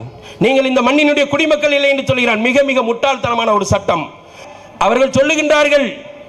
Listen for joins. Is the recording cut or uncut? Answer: uncut